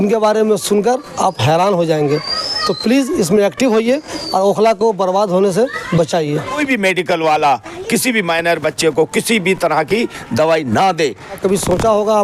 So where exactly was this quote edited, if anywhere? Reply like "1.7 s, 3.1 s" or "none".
6.6 s, 11.4 s